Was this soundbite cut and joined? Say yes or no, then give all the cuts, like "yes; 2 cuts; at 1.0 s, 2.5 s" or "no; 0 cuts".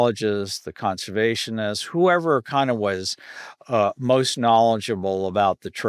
no; 0 cuts